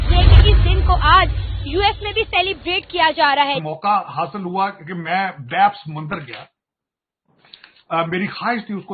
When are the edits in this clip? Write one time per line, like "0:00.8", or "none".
0:03.7